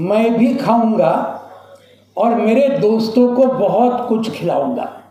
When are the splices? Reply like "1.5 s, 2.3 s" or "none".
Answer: none